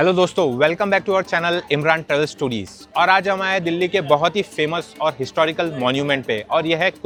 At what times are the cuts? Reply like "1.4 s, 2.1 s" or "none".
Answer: none